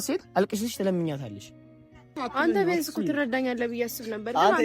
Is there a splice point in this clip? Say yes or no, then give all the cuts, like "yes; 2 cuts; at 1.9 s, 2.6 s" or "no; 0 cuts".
yes; 1 cut; at 2.1 s